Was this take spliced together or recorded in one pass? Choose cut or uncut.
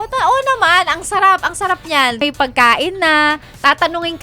cut